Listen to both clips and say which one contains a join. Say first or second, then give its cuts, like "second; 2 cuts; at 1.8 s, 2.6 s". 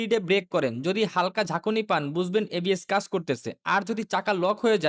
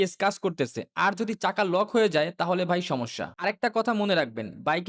second; 1 cut; at 3.3 s